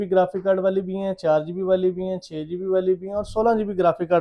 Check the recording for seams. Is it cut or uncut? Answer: uncut